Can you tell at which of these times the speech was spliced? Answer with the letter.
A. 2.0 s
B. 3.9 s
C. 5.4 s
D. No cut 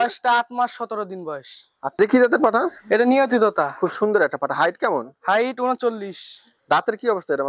A